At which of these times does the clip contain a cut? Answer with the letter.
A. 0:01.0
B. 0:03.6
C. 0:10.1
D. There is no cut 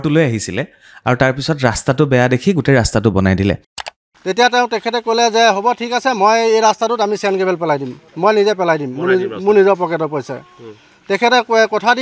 B